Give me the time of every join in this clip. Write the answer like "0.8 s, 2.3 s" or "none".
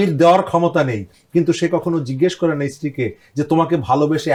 none